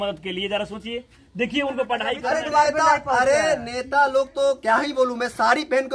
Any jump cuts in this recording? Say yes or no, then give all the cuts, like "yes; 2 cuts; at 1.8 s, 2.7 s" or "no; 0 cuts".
yes; 1 cut; at 2.2 s